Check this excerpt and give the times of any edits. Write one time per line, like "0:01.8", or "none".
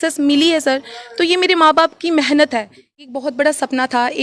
0:02.8